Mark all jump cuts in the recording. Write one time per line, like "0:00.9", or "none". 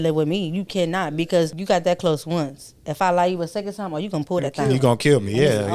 0:01.6